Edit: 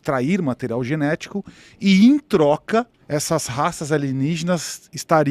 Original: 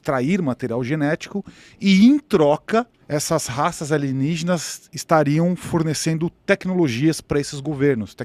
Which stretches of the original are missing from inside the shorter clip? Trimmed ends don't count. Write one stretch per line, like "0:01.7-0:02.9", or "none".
none